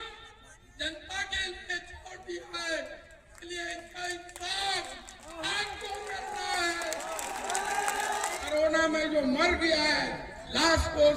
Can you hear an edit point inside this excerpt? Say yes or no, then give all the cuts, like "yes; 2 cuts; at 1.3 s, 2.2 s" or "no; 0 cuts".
yes; 1 cut; at 8.4 s